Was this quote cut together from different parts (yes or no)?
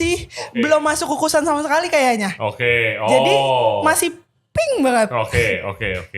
no